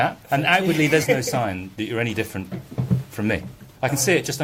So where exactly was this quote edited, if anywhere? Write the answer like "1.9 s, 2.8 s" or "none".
none